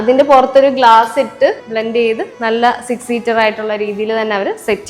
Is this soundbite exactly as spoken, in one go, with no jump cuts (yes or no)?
no